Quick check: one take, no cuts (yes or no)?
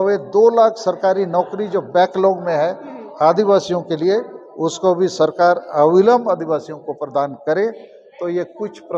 yes